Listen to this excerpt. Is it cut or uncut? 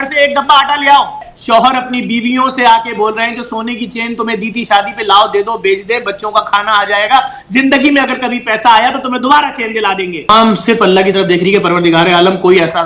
cut